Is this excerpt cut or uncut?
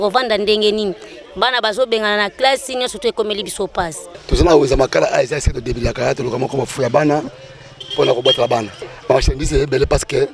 cut